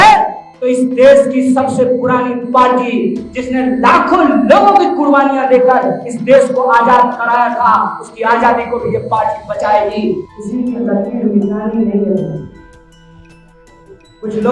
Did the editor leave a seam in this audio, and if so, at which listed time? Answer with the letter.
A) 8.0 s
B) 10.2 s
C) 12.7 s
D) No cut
B